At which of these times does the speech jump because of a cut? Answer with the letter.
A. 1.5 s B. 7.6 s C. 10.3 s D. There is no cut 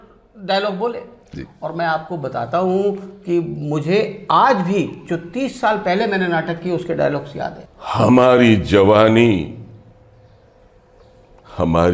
B